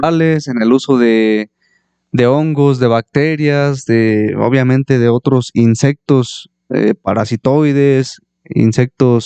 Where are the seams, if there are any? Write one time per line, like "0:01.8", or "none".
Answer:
none